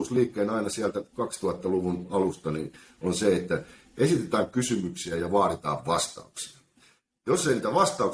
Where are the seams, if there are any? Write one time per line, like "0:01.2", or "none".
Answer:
none